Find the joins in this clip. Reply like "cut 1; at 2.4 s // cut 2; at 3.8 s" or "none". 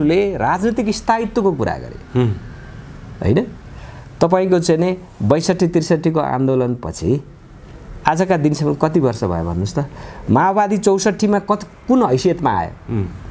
none